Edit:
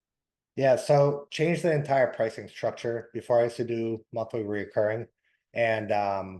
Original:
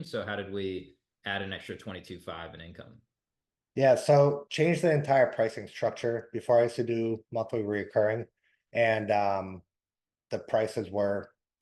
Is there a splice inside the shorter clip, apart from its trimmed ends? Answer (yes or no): no